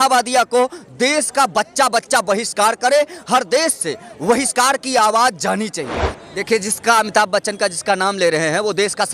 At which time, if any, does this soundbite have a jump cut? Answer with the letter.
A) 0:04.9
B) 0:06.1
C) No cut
B